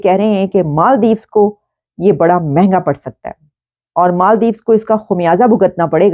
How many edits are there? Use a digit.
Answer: 0